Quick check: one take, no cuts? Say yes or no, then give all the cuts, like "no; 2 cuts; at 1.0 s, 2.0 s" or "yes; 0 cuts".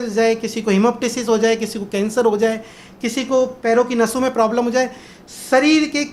yes; 0 cuts